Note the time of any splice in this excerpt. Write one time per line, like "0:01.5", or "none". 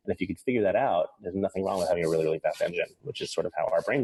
none

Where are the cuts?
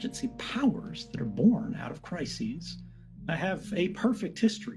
none

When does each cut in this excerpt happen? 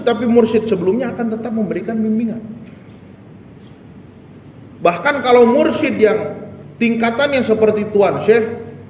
none

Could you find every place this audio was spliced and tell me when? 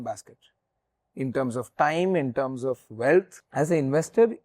0:03.4

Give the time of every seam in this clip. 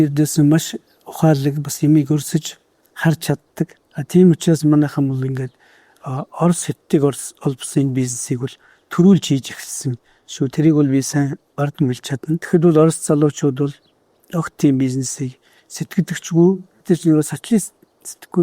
none

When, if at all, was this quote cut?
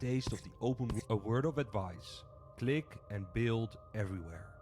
0:01.0

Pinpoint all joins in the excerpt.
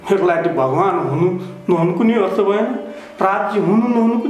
none

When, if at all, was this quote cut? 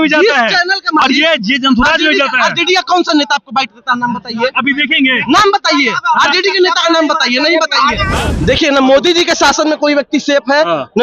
0:08.1

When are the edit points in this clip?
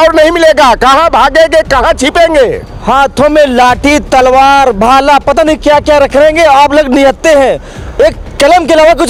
none

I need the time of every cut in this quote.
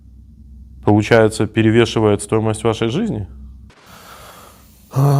0:03.8

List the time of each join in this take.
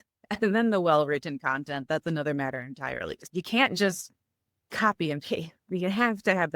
0:03.2

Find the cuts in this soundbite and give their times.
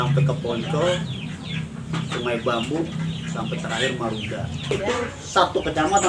0:04.7

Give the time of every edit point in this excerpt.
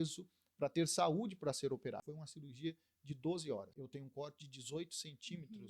0:02.1
0:03.8

